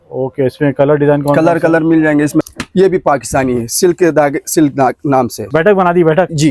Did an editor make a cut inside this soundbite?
yes; 2 cuts; at 2.4 s, 5.4 s

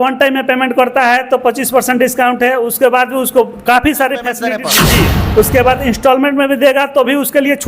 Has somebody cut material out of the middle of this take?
yes; 1 cut; at 4.6 s

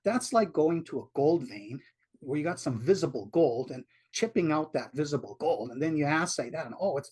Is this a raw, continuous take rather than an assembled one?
yes; 0 cuts

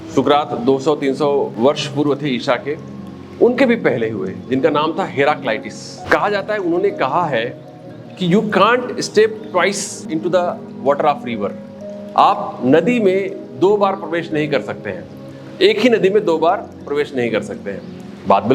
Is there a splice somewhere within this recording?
yes; 3 cuts; at 1.5 s, 6.0 s, 10.0 s

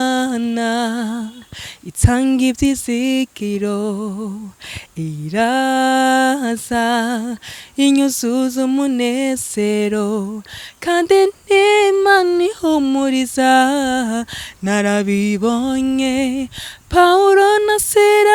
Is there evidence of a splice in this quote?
no; 0 cuts

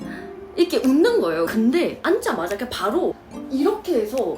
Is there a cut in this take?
yes; 1 cut; at 1.5 s

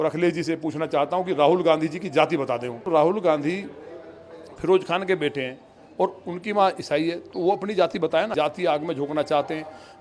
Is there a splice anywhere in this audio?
yes; 2 cuts; at 2.9 s, 8.3 s

